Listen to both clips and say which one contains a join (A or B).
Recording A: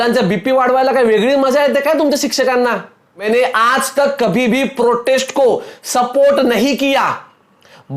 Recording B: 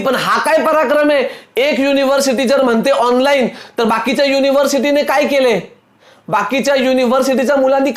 A